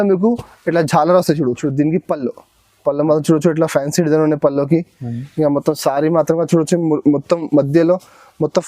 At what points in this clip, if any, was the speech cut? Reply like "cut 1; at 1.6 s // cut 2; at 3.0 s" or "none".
cut 1; at 1.6 s